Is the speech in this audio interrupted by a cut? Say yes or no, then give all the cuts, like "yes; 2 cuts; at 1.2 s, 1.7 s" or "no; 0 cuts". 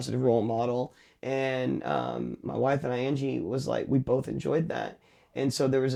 no; 0 cuts